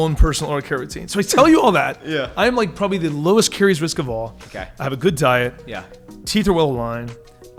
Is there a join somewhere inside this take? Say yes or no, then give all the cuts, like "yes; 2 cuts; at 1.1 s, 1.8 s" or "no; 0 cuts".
no; 0 cuts